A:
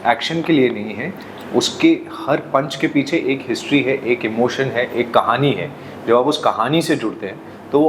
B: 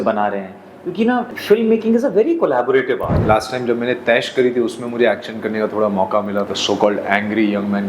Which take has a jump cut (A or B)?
B